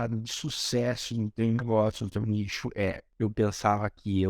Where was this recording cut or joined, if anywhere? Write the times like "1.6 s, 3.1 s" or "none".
3.0 s